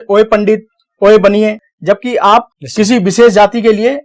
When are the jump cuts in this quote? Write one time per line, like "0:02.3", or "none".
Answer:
0:01.6
0:02.6